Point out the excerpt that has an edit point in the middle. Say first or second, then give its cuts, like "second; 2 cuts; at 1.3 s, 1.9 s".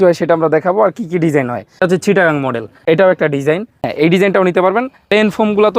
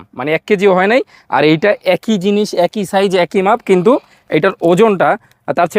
first; 4 cuts; at 1.8 s, 2.7 s, 3.9 s, 5.0 s